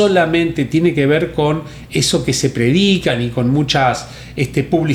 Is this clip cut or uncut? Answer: uncut